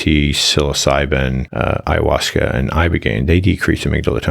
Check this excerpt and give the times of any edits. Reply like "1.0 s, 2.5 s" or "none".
1.4 s